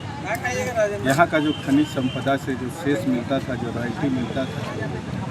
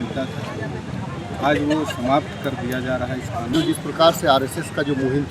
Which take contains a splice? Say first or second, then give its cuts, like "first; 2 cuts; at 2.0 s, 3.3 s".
second; 1 cut; at 3.5 s